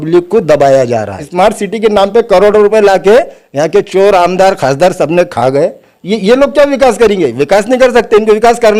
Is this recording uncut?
no; 1 cut; at 1.2 s

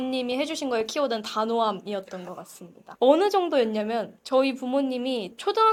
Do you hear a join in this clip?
no; 0 cuts

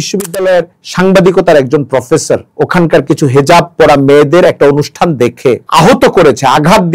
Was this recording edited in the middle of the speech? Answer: yes; 1 cut; at 5.6 s

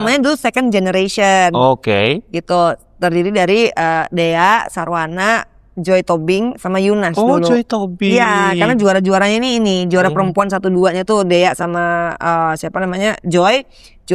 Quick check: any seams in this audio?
no; 0 cuts

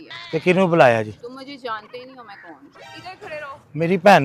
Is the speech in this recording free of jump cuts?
yes; 0 cuts

